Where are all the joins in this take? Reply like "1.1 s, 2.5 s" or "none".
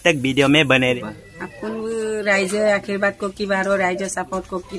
1.0 s